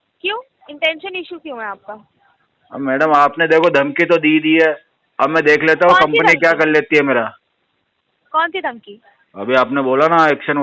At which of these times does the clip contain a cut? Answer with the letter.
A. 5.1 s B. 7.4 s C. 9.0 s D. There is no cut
D